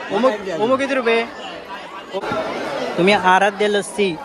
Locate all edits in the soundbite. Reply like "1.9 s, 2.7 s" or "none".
2.2 s